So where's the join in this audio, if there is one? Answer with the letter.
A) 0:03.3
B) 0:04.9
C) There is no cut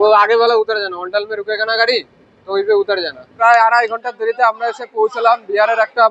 A